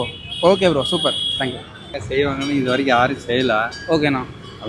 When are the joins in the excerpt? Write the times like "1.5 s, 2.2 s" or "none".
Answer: 1.9 s